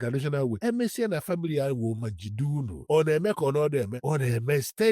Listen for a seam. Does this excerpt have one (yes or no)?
yes